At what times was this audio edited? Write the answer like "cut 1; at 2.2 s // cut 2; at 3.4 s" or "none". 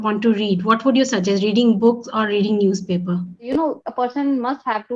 cut 1; at 3.5 s